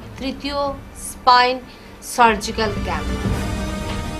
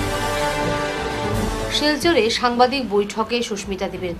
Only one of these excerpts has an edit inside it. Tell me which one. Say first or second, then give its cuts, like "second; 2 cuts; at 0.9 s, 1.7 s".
second; 1 cut; at 1.3 s